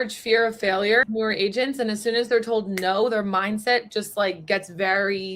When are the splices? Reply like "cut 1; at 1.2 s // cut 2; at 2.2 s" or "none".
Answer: cut 1; at 1.0 s